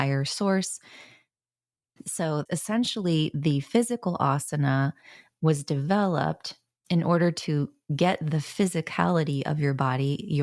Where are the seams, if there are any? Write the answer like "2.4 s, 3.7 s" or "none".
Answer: 2.4 s